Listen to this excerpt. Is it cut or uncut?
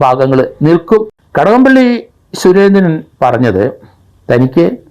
cut